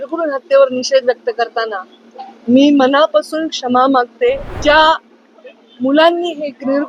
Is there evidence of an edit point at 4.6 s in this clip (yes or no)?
yes